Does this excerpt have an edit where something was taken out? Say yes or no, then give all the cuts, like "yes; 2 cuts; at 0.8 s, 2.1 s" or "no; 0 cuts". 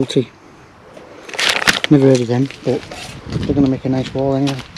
no; 0 cuts